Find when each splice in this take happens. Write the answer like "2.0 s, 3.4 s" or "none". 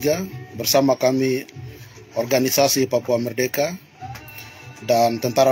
none